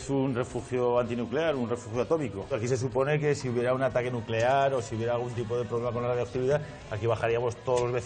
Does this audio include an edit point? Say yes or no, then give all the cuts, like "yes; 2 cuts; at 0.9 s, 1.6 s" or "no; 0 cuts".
yes; 1 cut; at 2.5 s